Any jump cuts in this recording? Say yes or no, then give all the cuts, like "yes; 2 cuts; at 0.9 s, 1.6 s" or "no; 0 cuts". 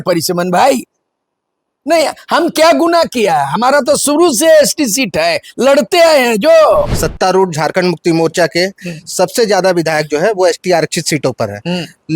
yes; 1 cut; at 7.0 s